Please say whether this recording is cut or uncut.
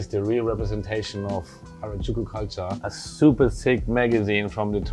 cut